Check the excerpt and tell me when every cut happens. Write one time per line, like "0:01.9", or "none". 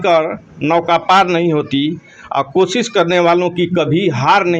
none